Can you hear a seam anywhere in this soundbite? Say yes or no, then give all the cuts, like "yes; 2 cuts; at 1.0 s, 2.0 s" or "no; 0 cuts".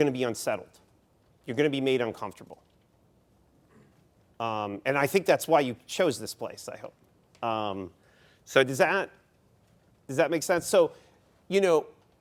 no; 0 cuts